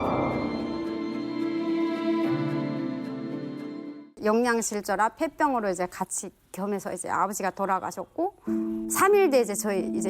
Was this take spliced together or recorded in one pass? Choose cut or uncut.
cut